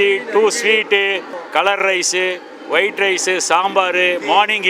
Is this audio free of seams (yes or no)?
no